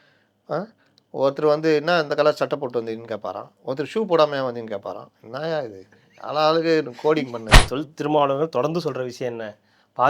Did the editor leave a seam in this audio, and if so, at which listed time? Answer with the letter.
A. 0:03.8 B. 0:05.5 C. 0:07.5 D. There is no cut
C